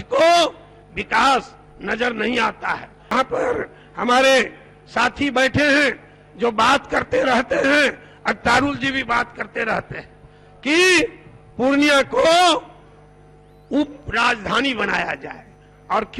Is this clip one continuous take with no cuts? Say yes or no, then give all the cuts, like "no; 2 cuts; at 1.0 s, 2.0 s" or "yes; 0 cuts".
no; 1 cut; at 2.9 s